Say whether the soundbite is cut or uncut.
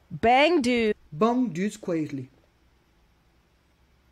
uncut